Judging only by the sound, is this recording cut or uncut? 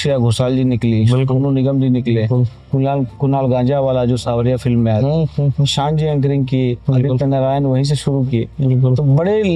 uncut